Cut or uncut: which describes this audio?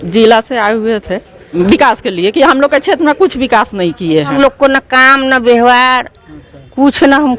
cut